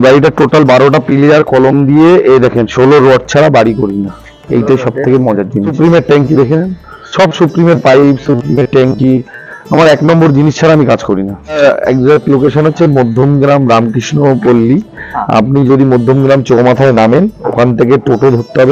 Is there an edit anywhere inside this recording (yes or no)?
yes